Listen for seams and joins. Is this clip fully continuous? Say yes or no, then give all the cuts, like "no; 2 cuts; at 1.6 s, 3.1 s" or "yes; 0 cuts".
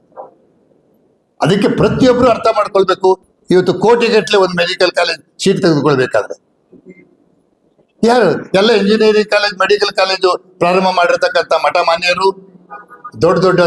no; 1 cut; at 3.3 s